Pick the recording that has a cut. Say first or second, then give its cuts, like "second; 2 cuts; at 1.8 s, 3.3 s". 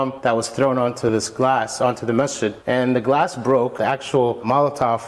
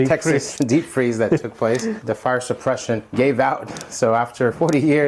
first; 1 cut; at 4.1 s